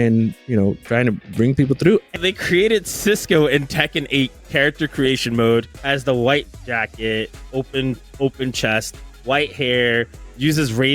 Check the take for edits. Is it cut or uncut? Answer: cut